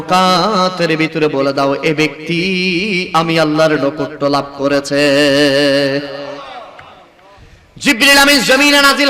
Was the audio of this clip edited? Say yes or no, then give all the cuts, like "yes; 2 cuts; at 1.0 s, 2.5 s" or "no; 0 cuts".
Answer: no; 0 cuts